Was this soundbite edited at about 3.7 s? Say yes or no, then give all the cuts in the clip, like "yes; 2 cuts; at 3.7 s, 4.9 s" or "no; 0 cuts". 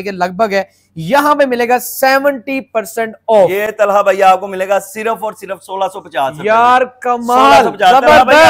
no; 0 cuts